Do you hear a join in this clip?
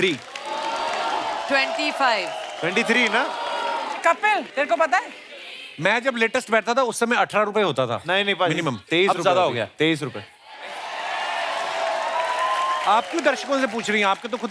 no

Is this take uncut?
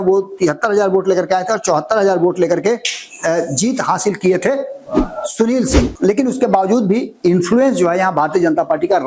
no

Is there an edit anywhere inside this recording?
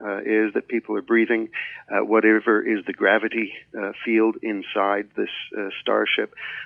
no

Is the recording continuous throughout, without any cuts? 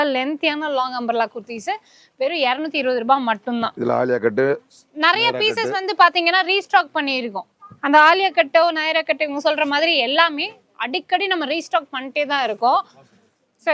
yes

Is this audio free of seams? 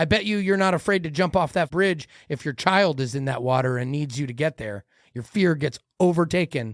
no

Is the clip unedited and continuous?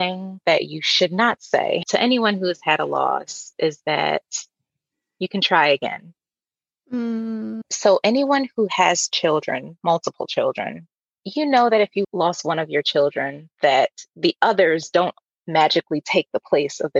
no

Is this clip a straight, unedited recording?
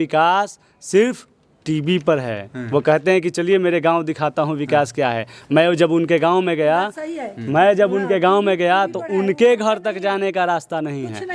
yes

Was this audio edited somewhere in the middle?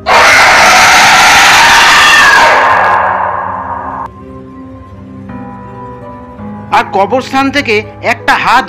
no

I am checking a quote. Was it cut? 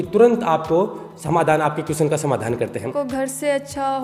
yes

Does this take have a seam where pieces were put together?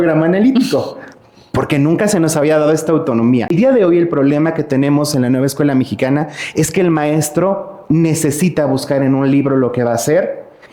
yes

